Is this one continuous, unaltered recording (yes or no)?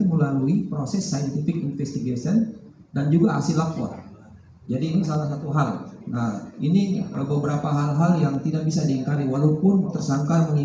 yes